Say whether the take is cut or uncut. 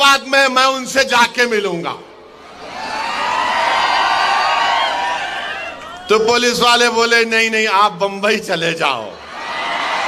uncut